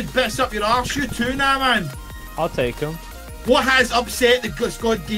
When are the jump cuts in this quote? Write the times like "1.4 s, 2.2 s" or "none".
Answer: none